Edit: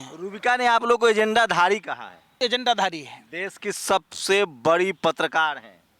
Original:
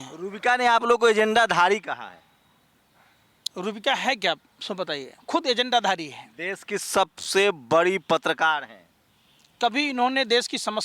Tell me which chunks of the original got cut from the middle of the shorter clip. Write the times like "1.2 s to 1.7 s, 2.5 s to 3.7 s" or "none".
2.4 s to 5.4 s